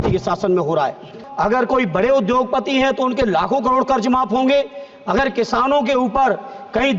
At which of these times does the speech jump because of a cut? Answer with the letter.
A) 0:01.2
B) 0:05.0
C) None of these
A